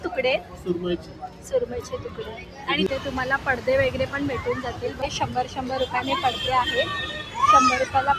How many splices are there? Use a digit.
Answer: 2